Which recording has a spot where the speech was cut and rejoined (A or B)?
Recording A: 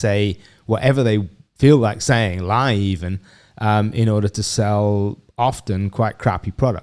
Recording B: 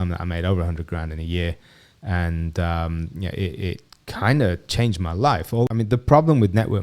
B